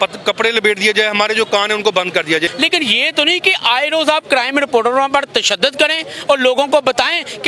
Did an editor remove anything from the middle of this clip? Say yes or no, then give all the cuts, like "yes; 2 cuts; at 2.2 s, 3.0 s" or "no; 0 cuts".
yes; 1 cut; at 2.5 s